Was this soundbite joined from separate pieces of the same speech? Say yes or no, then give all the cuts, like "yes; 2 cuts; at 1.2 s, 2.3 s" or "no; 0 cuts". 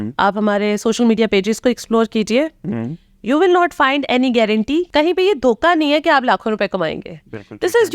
yes; 1 cut; at 4.9 s